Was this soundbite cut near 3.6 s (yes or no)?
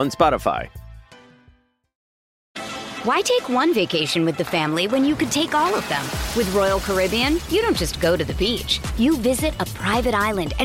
no